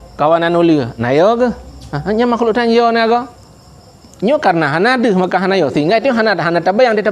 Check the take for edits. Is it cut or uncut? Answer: uncut